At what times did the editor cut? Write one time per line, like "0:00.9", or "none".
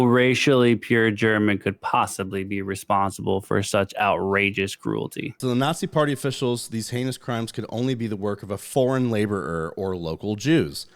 0:05.4